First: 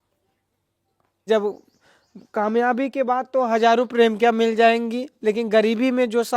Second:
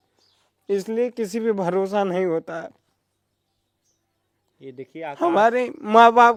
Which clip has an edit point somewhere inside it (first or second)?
first